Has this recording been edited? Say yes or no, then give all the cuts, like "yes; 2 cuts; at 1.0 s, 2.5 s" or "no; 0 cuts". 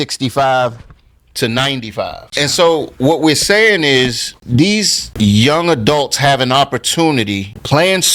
yes; 1 cut; at 2.2 s